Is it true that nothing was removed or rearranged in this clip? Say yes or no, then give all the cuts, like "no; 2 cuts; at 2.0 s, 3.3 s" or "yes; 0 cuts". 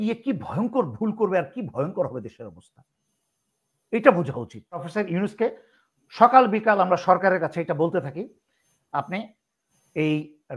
no; 1 cut; at 4.9 s